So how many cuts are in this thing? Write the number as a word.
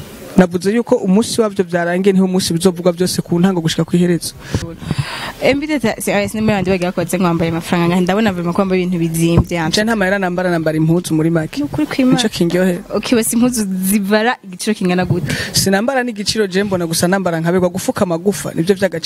one